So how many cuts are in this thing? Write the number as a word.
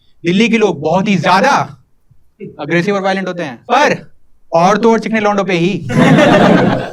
one